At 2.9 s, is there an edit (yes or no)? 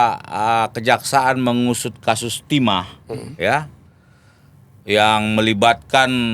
no